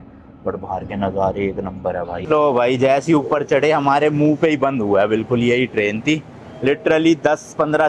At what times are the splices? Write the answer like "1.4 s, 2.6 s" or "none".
2.2 s